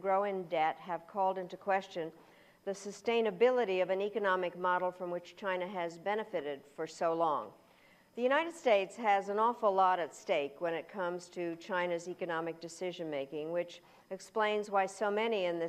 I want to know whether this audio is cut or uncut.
uncut